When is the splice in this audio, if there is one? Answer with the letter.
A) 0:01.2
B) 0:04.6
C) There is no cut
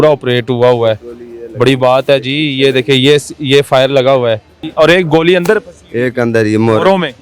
B